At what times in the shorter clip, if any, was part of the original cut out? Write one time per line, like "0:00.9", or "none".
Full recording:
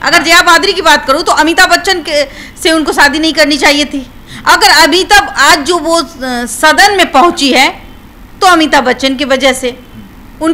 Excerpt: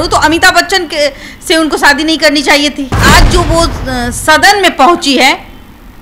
0:03.0